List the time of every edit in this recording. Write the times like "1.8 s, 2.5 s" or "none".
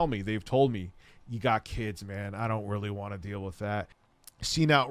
4.0 s